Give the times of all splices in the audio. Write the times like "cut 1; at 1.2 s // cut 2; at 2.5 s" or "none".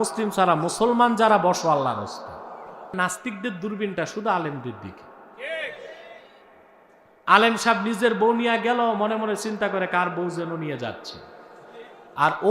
cut 1; at 2.9 s

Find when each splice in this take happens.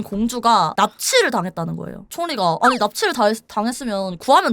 cut 1; at 2.0 s

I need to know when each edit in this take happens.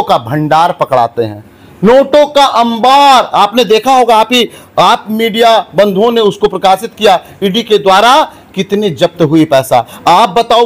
none

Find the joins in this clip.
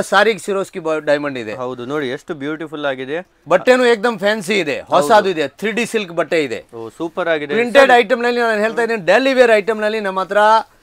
none

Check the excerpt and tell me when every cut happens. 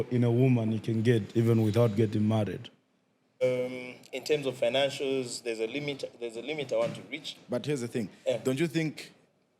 cut 1; at 3.4 s

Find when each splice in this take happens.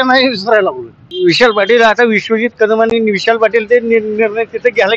cut 1; at 0.9 s

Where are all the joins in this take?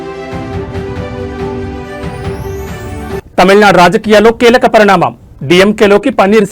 cut 1; at 2.9 s

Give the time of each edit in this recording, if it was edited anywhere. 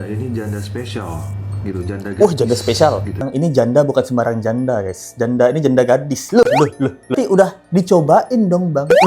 cut 1; at 3.3 s // cut 2; at 7.1 s

